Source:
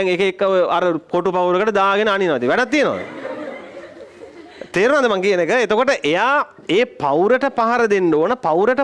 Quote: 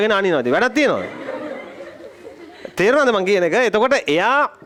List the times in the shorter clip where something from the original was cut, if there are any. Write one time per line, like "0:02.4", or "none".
none